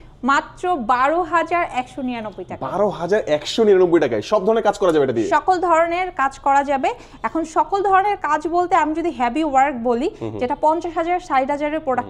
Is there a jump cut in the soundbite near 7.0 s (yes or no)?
no